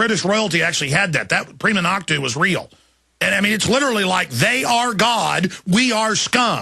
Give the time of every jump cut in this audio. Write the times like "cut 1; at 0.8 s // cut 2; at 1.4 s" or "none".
cut 1; at 2.3 s